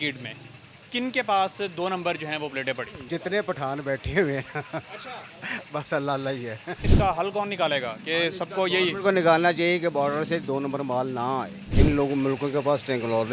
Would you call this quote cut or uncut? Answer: cut